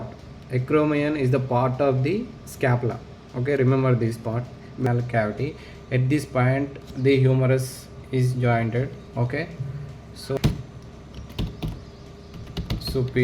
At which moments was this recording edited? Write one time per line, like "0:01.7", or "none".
0:04.9
0:10.4